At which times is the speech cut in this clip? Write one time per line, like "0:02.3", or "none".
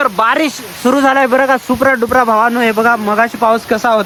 none